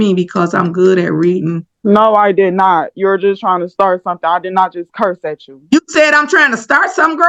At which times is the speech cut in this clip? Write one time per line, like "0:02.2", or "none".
none